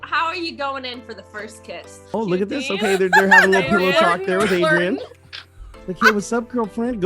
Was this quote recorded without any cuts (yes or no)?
no